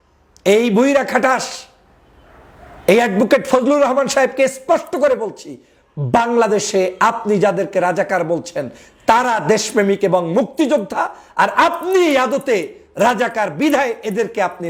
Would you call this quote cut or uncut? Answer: uncut